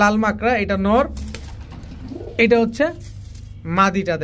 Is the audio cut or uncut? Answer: uncut